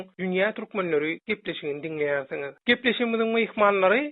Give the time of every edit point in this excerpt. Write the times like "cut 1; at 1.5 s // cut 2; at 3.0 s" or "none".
none